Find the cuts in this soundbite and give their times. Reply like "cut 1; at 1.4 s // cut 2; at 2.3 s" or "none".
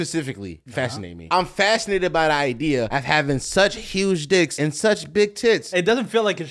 cut 1; at 1.1 s // cut 2; at 2.9 s // cut 3; at 4.5 s // cut 4; at 5.7 s